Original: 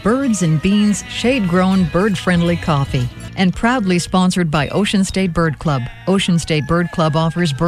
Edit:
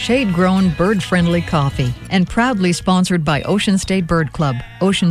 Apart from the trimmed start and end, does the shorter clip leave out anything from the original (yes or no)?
yes